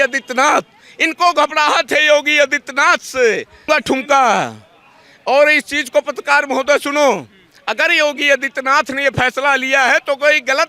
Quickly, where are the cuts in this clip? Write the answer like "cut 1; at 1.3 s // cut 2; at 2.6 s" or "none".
cut 1; at 3.7 s